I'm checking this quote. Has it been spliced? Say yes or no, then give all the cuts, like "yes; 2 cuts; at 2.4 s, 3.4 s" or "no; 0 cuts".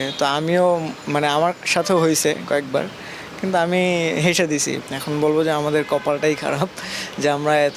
yes; 1 cut; at 4.8 s